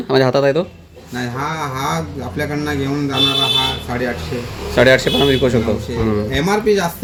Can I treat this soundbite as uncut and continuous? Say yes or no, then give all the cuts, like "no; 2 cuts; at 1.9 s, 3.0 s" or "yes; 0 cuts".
yes; 0 cuts